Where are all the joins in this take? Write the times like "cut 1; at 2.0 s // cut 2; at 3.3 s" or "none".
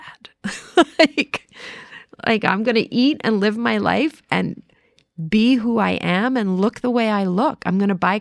none